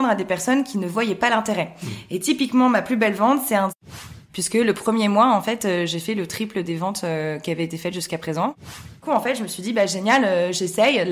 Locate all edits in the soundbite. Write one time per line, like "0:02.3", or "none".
0:03.9
0:09.0